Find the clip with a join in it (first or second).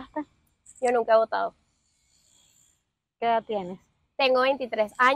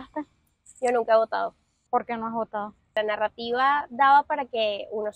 second